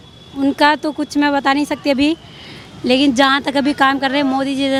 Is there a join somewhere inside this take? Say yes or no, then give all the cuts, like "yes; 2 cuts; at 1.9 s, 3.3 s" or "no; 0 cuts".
no; 0 cuts